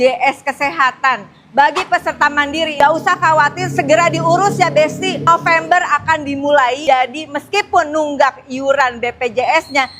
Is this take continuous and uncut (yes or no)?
no